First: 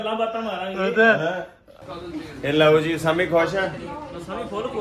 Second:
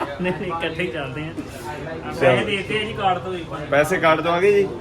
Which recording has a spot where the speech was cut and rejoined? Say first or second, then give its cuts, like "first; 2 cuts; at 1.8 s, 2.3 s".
first; 1 cut; at 2.0 s